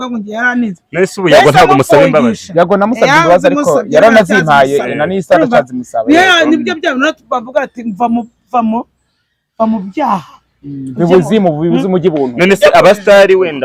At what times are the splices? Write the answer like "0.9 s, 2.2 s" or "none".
none